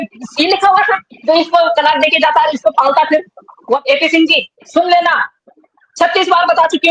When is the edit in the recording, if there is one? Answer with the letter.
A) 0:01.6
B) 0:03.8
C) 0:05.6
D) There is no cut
B